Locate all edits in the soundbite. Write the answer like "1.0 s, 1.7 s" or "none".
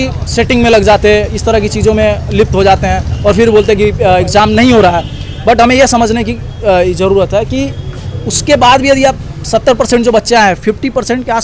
none